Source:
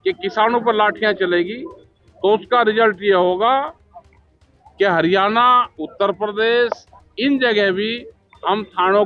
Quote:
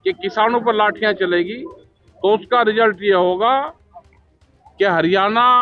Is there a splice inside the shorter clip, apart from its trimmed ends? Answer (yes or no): no